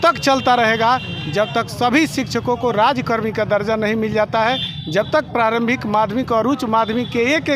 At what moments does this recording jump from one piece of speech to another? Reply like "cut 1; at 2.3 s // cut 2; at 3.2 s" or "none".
none